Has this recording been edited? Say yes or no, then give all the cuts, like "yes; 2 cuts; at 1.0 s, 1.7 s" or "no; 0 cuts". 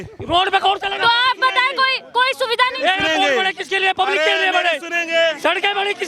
no; 0 cuts